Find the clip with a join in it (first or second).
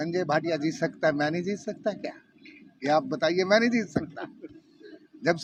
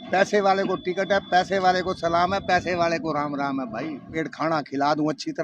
second